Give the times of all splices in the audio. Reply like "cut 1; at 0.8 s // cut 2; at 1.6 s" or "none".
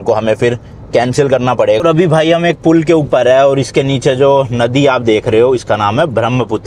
cut 1; at 1.8 s